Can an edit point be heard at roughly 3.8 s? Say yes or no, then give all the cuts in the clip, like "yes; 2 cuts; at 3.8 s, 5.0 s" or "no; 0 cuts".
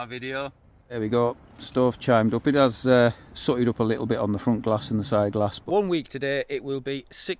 no; 2 cuts; at 1.0 s, 5.6 s